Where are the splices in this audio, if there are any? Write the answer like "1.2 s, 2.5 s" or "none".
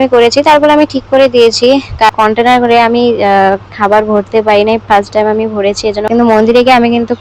2.1 s, 6.1 s